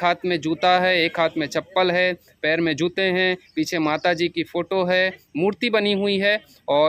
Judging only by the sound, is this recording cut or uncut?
uncut